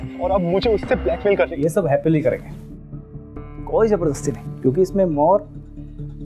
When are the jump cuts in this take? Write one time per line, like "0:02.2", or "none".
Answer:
0:01.5